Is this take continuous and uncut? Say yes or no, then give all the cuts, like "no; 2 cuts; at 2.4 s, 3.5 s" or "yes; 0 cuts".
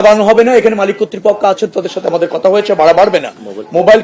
yes; 0 cuts